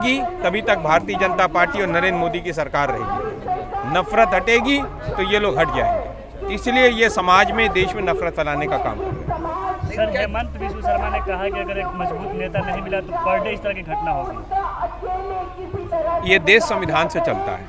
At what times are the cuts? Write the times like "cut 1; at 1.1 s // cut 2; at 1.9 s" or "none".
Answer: none